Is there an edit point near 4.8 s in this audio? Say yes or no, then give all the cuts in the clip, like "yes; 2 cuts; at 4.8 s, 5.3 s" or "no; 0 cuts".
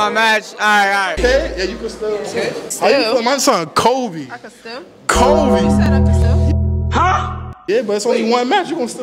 no; 2 cuts; at 1.2 s, 2.7 s